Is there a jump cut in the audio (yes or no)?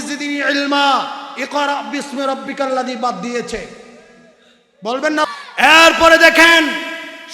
yes